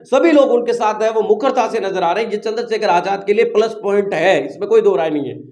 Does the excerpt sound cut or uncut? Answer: uncut